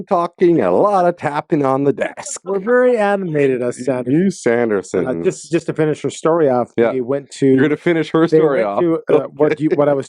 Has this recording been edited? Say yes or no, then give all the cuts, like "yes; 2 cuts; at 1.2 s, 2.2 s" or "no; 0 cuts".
no; 0 cuts